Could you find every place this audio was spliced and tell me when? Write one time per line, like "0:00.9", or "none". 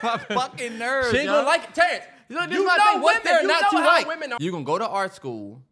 0:04.2